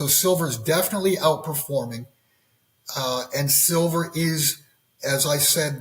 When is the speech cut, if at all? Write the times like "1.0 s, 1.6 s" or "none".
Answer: none

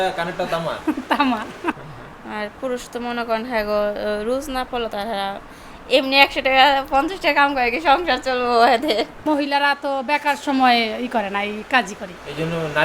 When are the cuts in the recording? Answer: 1.8 s, 9.2 s

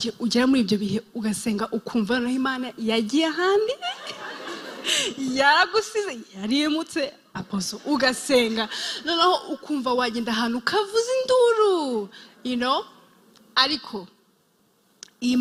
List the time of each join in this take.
none

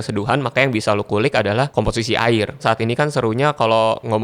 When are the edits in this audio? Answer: 1.7 s, 2.6 s

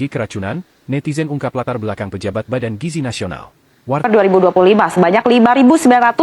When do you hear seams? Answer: 4.0 s

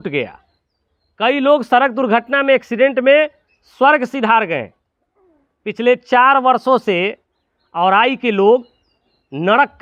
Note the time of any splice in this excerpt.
none

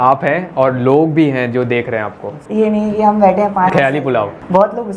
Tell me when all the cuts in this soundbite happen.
2.2 s

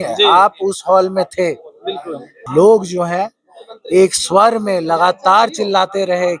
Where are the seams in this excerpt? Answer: 2.4 s

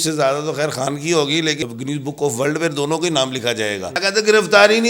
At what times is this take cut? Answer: 1.6 s, 4.0 s

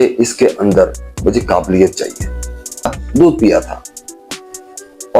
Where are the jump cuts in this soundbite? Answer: 3.0 s

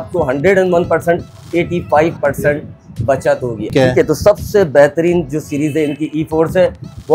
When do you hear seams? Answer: 3.7 s

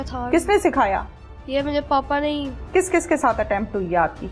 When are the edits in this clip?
2.6 s

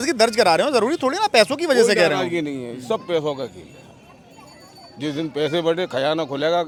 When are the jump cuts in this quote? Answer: none

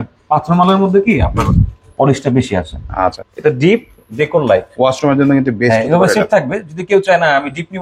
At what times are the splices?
3.2 s

